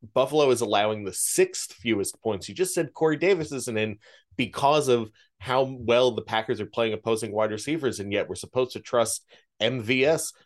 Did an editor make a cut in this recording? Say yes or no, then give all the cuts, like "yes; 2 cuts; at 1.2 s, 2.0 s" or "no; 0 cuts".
no; 0 cuts